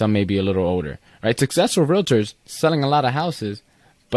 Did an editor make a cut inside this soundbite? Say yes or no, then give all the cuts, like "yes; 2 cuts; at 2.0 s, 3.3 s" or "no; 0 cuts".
no; 0 cuts